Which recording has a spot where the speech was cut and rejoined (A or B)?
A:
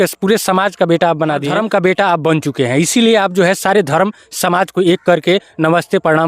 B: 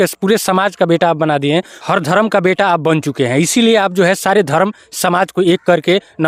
A